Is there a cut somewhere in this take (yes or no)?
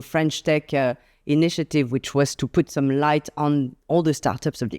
no